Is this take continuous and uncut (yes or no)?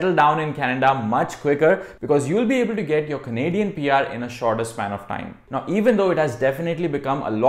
yes